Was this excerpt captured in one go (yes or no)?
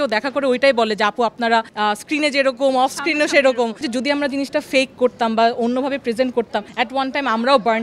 no